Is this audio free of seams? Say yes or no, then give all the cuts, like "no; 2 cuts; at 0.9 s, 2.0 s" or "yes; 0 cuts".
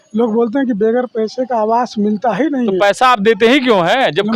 yes; 0 cuts